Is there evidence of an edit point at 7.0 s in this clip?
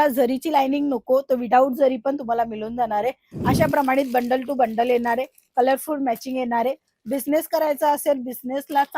no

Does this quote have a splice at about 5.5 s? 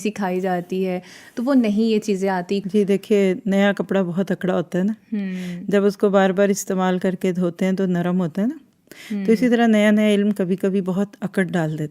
no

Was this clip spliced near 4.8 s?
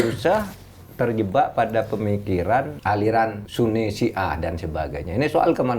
no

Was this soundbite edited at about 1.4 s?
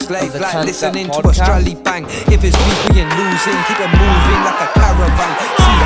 no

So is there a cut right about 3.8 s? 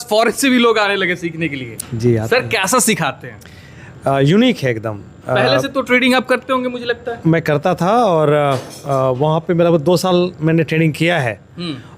no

